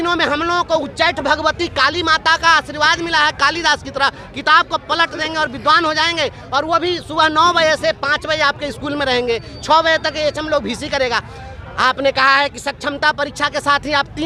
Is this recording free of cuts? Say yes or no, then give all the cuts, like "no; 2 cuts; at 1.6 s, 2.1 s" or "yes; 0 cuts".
yes; 0 cuts